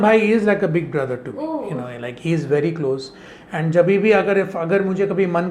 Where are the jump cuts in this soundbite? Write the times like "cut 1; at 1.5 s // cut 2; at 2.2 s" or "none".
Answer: cut 1; at 2.0 s